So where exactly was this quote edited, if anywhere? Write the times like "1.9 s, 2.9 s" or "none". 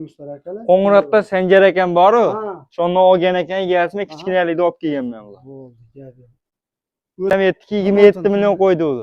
7.3 s